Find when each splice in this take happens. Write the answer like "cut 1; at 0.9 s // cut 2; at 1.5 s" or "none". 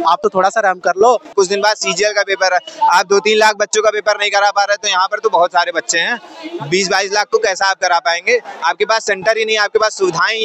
cut 1; at 1.3 s